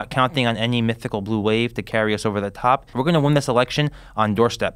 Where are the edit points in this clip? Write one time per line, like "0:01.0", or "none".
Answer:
0:02.9